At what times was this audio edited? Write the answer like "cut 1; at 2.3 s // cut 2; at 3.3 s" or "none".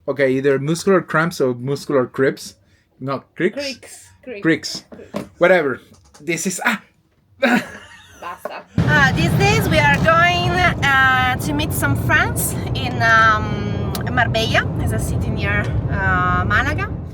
cut 1; at 8.8 s